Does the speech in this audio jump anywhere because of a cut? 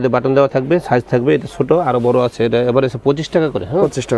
no; 0 cuts

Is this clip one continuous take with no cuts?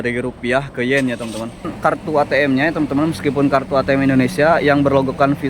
no; 1 cut; at 1.7 s

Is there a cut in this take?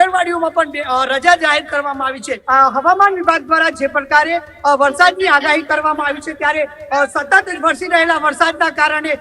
yes; 1 cut; at 2.3 s

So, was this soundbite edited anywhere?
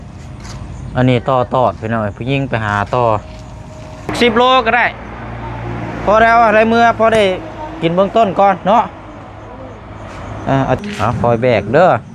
yes; 2 cuts; at 4.1 s, 10.8 s

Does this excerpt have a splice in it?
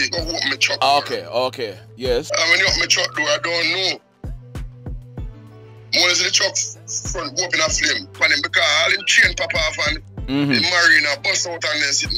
yes; 2 cuts; at 2.3 s, 8.2 s

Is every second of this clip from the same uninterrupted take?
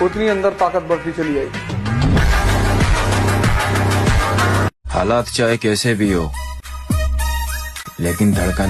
yes; 0 cuts

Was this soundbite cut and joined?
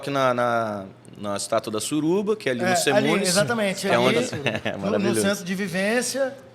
no; 0 cuts

